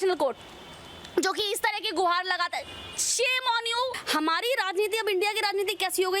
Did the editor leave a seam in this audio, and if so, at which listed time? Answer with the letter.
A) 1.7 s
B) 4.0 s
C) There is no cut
B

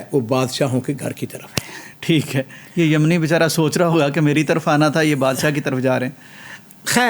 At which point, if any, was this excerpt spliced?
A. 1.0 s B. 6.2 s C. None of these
C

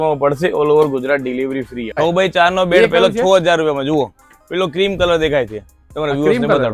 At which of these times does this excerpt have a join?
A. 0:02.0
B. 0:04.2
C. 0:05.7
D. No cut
A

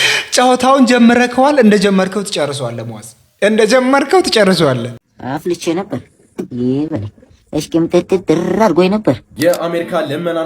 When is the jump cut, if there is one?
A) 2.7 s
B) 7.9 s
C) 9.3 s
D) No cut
C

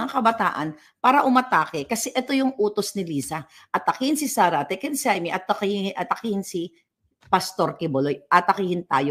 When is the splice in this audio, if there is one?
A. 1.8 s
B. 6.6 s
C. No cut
C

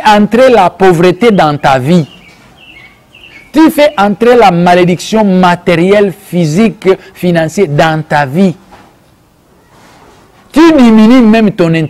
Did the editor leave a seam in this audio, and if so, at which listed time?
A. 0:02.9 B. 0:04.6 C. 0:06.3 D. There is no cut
D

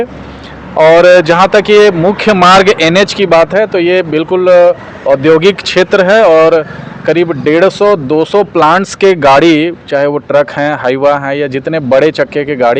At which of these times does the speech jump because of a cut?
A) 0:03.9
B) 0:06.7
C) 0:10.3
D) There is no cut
D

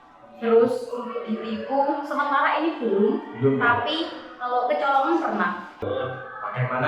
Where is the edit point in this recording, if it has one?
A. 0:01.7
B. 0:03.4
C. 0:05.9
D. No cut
C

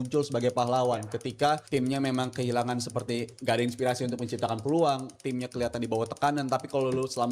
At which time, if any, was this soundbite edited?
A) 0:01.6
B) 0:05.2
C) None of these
A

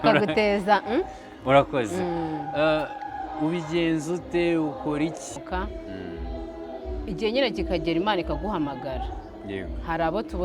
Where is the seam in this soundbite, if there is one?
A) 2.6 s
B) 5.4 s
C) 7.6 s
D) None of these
B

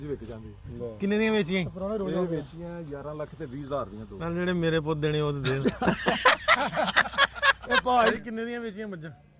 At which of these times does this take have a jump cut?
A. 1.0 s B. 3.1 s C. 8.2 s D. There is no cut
C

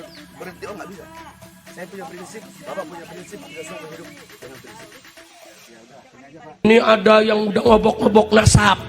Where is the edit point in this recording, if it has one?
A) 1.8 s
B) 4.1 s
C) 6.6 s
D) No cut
C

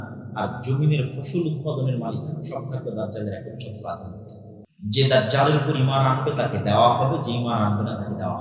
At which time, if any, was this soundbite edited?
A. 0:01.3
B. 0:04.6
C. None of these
B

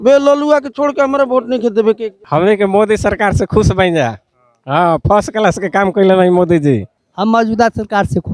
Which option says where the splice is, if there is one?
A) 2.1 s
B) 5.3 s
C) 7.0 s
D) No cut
A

